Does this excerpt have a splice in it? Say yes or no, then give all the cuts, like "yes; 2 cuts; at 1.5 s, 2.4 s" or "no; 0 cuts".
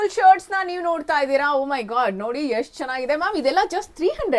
no; 0 cuts